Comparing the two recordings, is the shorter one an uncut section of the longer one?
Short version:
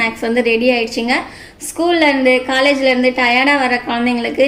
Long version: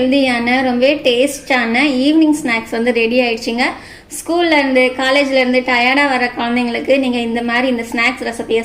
yes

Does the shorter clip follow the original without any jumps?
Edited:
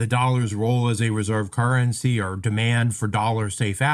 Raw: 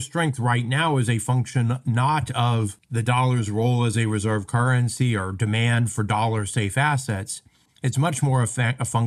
yes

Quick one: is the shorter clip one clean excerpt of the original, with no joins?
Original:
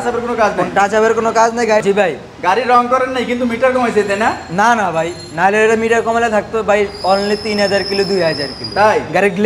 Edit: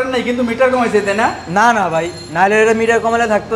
yes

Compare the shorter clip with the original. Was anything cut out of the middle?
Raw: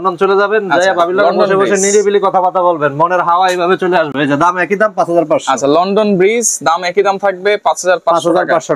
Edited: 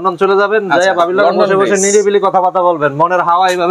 no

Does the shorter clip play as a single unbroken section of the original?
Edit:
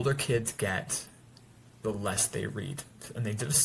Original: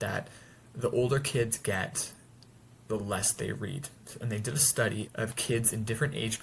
yes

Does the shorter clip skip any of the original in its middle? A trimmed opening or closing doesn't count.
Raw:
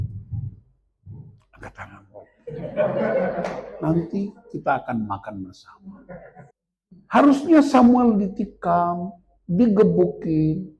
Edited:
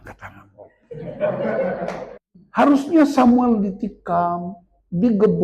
yes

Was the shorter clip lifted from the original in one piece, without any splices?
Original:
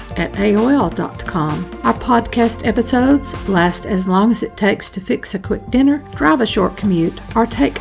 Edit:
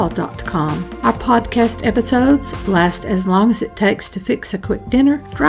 yes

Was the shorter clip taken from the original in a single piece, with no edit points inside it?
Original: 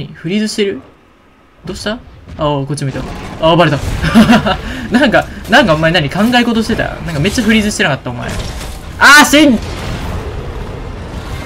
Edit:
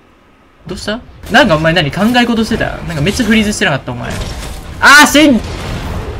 no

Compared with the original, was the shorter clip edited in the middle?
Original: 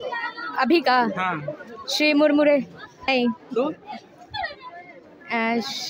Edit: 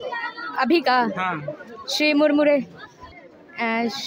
yes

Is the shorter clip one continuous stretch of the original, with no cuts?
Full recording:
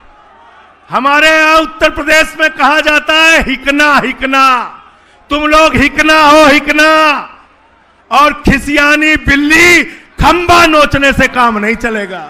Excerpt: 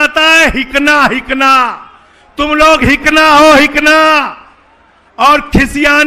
yes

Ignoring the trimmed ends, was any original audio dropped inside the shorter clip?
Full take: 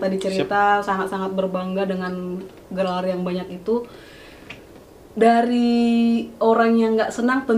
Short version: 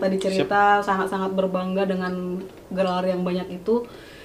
no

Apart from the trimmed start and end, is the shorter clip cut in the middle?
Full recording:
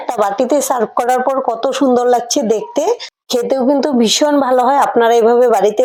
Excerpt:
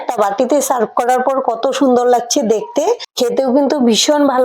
yes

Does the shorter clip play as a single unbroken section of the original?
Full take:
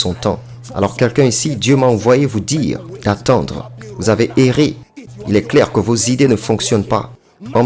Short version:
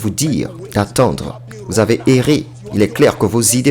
no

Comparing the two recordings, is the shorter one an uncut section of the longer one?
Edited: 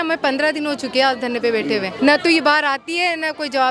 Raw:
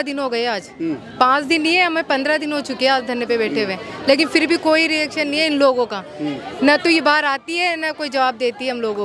no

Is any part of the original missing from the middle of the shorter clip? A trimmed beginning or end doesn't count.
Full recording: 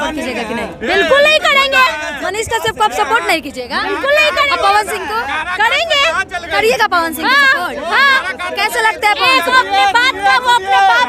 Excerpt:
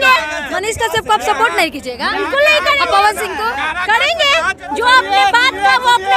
yes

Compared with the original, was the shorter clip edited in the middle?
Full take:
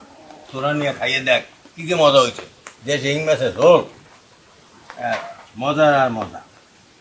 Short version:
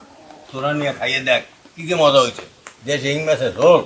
no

